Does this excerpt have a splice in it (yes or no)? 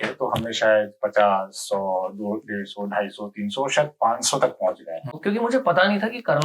yes